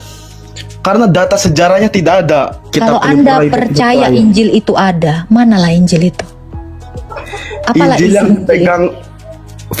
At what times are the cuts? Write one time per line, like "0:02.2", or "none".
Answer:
0:02.5